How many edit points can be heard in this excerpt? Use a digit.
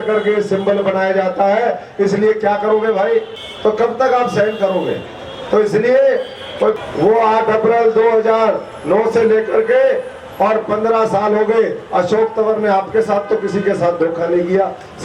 2